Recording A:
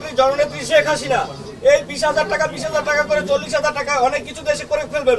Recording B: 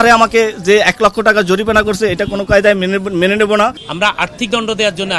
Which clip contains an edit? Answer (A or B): B